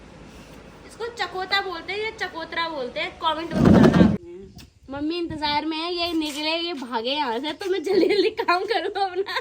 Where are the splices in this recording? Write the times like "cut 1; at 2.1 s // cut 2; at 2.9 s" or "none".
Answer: cut 1; at 4.2 s